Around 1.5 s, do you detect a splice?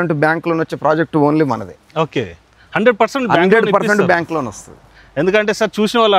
no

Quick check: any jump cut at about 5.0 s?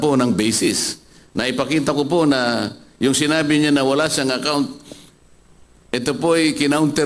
no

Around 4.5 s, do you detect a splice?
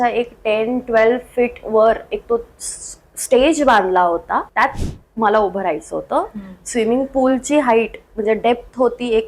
yes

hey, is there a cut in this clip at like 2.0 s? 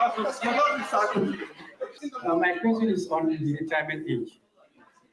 yes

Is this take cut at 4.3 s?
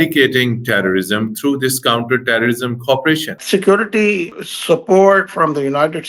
yes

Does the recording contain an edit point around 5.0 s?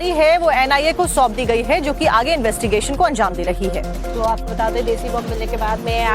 yes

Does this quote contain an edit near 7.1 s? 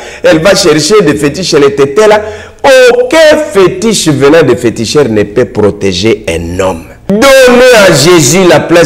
yes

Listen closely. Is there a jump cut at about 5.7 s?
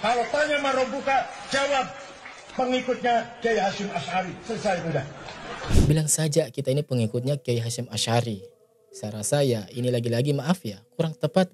yes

